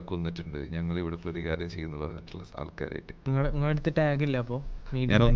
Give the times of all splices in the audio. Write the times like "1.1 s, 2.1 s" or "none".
3.3 s